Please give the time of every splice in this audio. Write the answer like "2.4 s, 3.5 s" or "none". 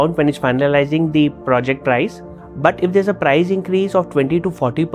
none